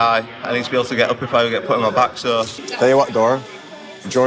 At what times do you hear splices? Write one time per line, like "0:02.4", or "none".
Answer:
0:02.5